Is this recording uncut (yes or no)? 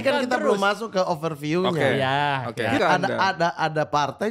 no